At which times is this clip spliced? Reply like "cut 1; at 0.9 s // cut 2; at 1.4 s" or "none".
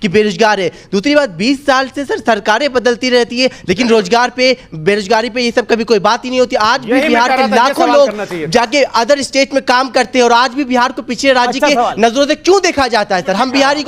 none